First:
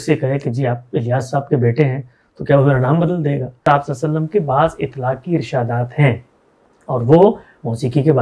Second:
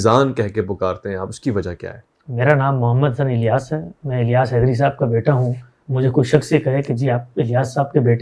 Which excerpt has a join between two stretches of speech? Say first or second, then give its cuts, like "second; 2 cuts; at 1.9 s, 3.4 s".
first; 1 cut; at 3.7 s